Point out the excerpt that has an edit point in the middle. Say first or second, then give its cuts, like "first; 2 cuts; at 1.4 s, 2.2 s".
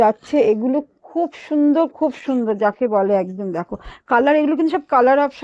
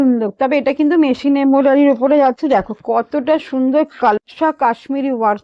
second; 1 cut; at 4.2 s